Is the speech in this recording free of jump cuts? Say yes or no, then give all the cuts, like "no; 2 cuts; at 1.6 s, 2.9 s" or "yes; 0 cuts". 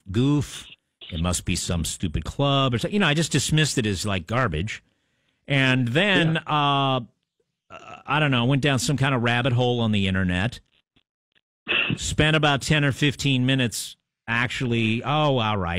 no; 1 cut; at 5.2 s